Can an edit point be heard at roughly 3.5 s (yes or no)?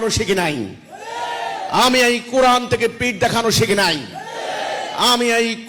no